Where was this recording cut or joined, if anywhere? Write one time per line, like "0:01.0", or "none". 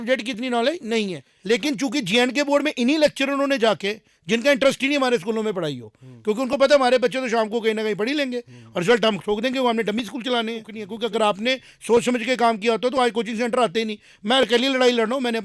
0:01.3
0:10.8

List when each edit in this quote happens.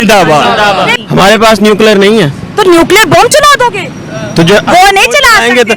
0:00.9

